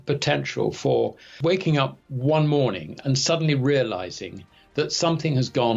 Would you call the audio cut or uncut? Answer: cut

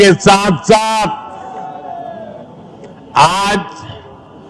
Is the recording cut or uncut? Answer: uncut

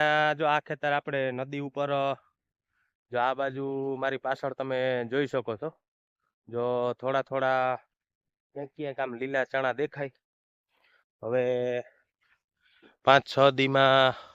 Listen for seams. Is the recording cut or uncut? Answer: uncut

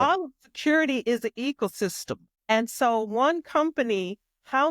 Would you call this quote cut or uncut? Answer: cut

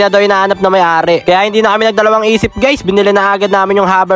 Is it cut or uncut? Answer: cut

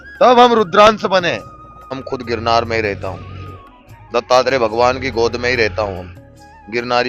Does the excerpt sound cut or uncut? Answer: cut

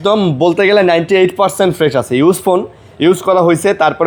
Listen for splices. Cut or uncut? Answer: uncut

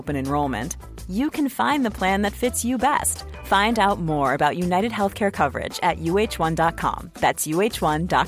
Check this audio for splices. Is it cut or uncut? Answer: uncut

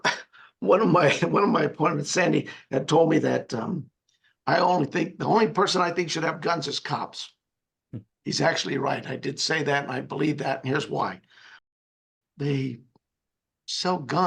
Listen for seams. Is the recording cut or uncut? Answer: cut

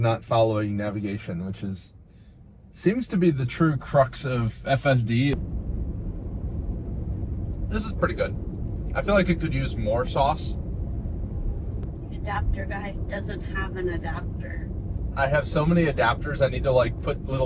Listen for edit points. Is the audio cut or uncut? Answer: cut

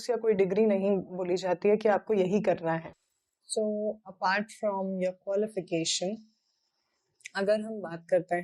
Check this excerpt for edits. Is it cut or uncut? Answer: uncut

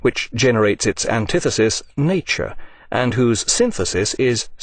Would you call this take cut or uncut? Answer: uncut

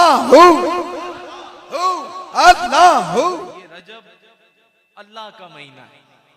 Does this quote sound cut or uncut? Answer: cut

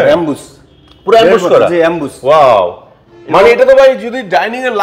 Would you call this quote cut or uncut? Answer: uncut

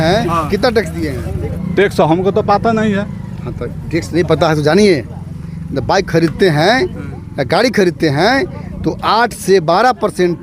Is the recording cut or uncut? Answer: cut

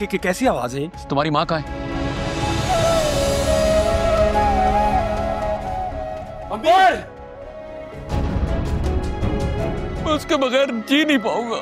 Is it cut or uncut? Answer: cut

